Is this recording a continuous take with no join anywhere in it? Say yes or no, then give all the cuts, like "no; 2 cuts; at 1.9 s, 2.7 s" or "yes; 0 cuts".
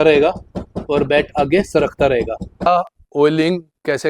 no; 1 cut; at 2.7 s